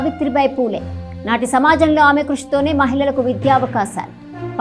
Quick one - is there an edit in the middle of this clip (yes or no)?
no